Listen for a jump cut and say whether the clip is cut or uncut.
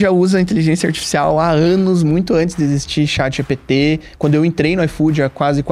uncut